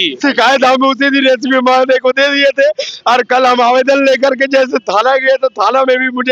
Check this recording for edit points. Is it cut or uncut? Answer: uncut